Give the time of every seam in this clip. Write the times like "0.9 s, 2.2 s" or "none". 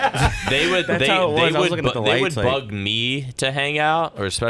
none